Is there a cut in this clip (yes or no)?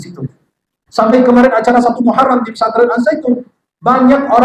no